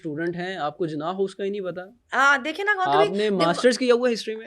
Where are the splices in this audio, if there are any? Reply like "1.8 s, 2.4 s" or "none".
none